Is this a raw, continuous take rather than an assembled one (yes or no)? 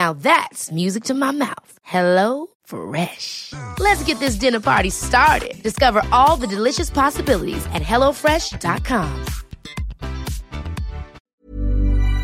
no